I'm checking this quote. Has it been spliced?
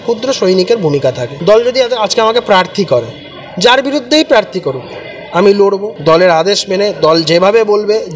yes; 2 cuts; at 1.3 s, 5.9 s

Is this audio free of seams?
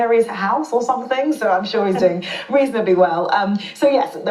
no; 1 cut; at 1.0 s

